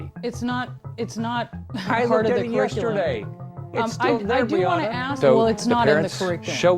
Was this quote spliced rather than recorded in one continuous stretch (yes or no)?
yes